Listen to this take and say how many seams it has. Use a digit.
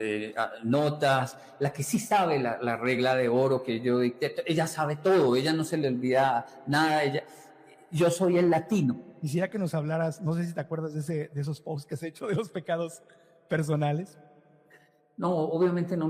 1